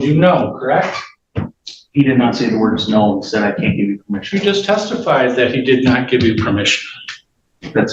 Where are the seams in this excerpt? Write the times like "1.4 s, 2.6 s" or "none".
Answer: none